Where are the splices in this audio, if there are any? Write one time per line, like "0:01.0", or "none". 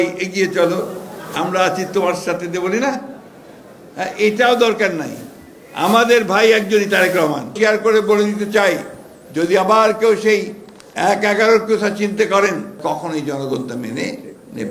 0:07.5
0:12.8